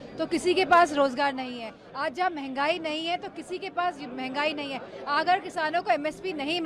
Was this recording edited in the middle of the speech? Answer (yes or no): no